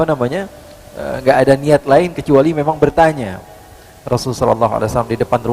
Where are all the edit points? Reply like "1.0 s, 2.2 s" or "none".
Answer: none